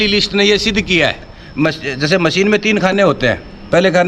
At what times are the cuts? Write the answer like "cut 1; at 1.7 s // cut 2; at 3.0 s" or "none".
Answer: cut 1; at 1.4 s